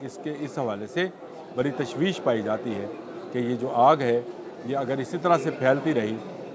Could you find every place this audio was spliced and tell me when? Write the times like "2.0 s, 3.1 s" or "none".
none